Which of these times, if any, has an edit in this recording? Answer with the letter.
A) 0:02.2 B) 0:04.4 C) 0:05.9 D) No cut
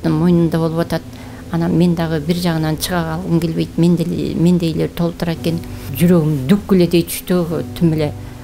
C